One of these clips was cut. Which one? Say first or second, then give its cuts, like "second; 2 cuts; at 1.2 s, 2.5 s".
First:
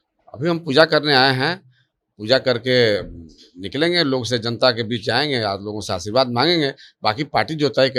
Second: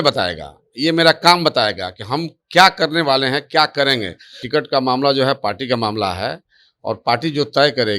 second; 1 cut; at 4.4 s